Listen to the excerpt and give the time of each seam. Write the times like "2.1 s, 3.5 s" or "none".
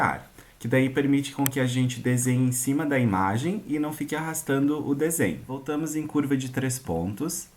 5.6 s